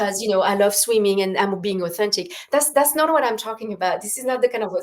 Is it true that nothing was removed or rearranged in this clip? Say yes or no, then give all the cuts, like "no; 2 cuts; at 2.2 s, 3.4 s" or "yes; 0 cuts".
yes; 0 cuts